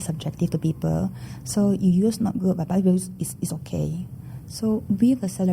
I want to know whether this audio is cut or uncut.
uncut